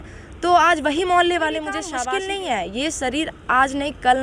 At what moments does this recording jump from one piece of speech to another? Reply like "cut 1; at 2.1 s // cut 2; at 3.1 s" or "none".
cut 1; at 1.9 s